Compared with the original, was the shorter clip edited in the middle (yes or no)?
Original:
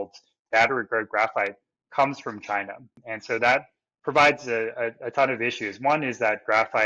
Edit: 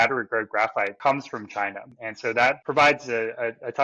yes